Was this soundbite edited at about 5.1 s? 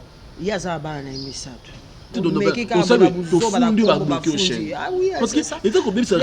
no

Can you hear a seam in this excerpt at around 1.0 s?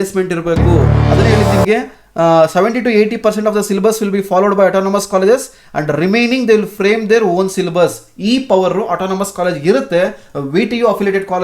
yes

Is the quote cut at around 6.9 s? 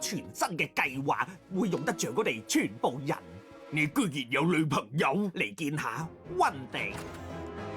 yes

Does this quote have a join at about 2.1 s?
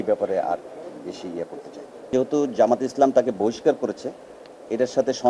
yes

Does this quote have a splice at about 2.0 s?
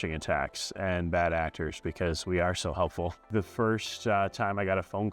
no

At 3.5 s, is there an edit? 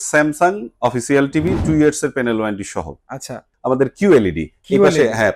yes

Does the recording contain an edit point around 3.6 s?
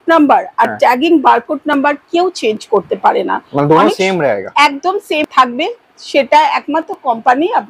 no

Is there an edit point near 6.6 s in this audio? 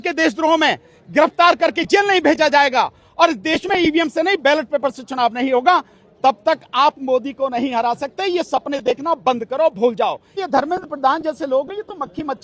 no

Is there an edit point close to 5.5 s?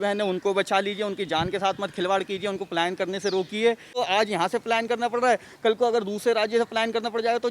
no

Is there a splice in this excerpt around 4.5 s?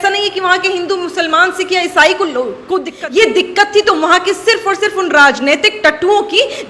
no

